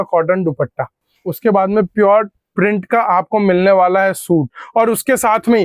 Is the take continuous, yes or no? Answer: yes